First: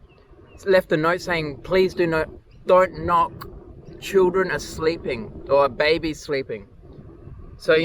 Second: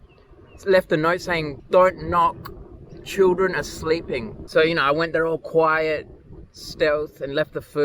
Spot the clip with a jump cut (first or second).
second